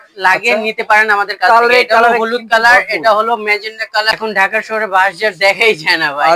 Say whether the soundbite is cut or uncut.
cut